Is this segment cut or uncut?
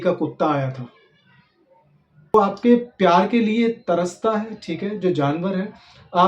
cut